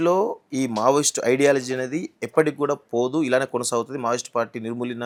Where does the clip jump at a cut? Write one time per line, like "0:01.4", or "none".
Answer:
none